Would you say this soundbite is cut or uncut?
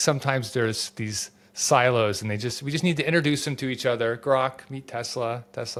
uncut